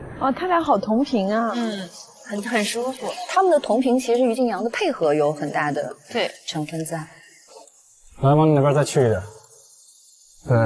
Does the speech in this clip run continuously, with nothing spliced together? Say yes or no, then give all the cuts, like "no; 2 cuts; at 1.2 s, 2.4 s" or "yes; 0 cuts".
yes; 0 cuts